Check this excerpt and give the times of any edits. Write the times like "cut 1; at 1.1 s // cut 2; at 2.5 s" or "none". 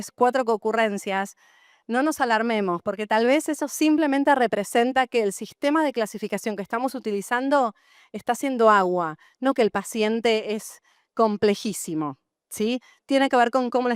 none